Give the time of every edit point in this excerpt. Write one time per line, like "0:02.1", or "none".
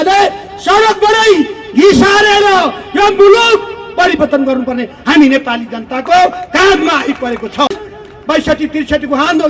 none